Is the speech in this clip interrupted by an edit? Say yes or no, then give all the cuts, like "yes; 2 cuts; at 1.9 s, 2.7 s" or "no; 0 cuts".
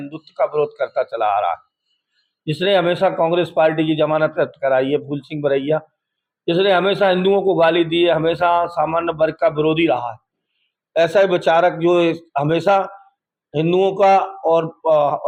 no; 0 cuts